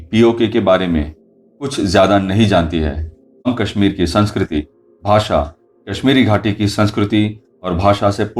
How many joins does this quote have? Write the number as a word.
one